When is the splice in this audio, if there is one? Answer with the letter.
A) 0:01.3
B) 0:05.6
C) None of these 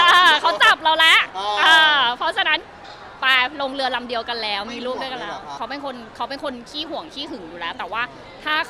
B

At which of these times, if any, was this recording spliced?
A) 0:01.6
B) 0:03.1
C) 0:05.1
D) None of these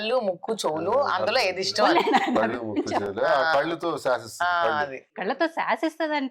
C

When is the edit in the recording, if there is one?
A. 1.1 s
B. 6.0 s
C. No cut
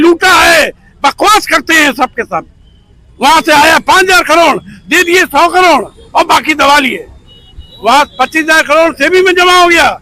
C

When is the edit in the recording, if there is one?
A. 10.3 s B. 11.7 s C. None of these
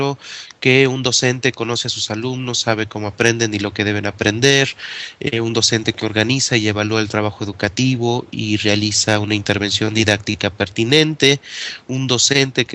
A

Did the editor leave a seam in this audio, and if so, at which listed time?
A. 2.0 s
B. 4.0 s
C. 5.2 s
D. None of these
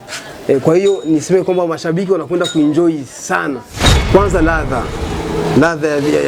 B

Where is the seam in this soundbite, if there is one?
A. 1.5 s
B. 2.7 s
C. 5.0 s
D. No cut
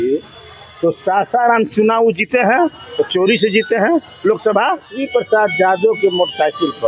C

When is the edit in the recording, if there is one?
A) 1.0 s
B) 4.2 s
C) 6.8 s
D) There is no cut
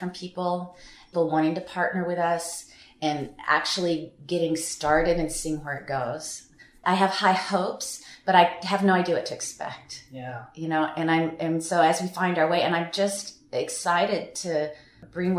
A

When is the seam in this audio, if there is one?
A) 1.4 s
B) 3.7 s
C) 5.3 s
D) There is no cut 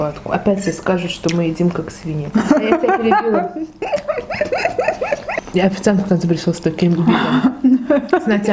C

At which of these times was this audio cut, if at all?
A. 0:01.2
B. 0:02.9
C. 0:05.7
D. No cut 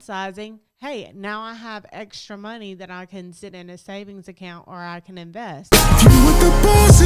C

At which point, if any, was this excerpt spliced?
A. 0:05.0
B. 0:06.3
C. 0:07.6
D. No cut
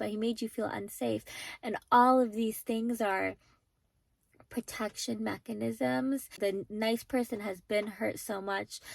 B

